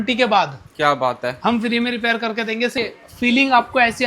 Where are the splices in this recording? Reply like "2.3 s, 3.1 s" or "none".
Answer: 2.7 s